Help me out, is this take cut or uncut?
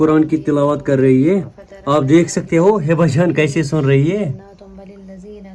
uncut